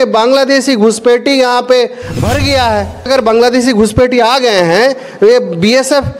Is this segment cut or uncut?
cut